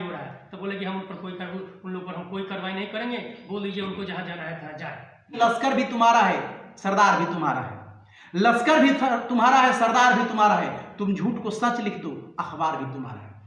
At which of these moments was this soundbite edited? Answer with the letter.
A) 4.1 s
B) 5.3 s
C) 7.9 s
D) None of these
B